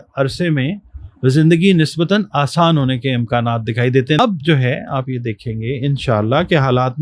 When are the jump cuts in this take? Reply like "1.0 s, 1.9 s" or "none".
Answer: 4.2 s